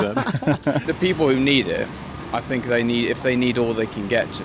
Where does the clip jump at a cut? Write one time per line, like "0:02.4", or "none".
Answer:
none